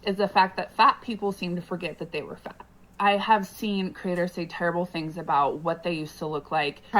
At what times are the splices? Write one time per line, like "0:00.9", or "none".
0:05.1